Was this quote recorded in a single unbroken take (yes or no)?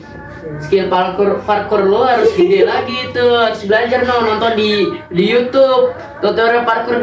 yes